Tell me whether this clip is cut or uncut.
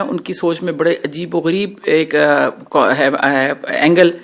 uncut